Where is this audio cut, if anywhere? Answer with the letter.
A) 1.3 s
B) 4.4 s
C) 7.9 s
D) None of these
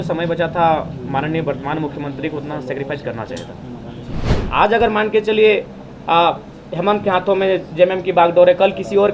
B